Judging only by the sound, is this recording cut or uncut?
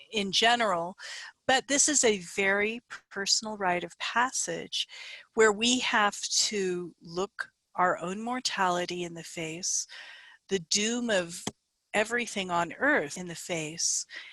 cut